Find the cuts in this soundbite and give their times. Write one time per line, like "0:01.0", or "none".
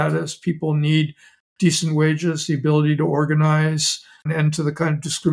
0:04.3